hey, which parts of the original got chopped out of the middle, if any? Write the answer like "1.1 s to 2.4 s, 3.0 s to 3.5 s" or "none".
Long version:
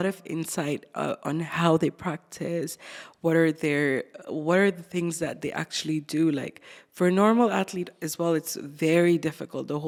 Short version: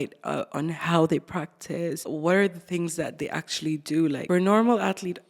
2.8 s to 4.3 s, 6.4 s to 6.9 s